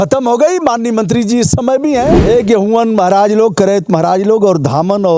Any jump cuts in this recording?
yes; 1 cut; at 2.2 s

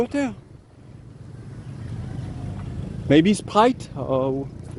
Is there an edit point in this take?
no; 0 cuts

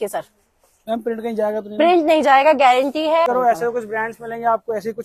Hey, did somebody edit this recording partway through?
yes; 1 cut; at 3.3 s

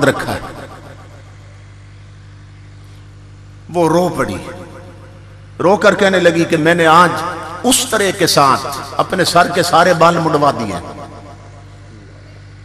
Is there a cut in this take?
no; 0 cuts

